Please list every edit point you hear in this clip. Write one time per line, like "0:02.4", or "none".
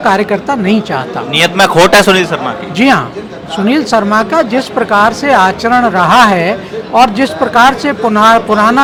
none

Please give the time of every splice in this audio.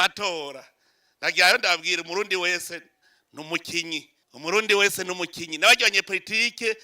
0:04.2

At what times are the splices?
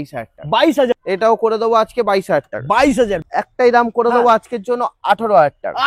0:01.0
0:03.2

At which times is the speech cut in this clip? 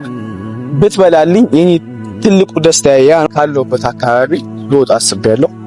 0:03.3

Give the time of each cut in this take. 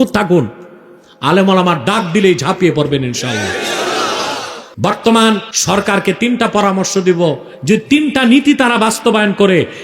0:04.6
0:05.5

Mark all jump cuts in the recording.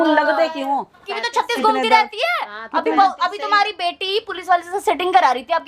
0:01.0

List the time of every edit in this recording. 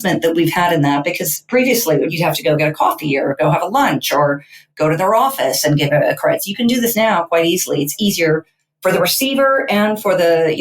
0:02.1

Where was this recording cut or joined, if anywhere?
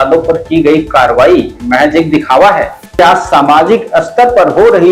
0:02.8

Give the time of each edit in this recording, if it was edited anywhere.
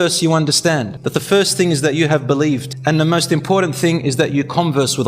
0:01.0
0:02.7

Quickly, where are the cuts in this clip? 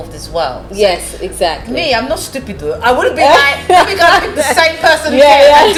none

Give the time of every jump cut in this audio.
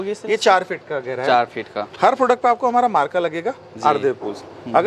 none

